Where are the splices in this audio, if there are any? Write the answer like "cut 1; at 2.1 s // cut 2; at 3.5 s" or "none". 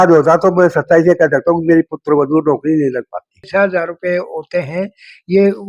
cut 1; at 3.4 s